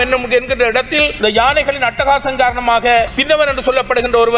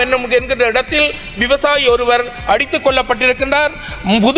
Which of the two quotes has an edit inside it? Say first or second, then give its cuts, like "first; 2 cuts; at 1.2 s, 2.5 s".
first; 2 cuts; at 1.1 s, 3.2 s